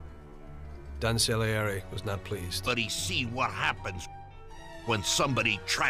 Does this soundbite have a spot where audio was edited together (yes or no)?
no